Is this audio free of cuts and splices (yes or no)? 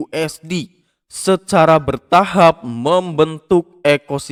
yes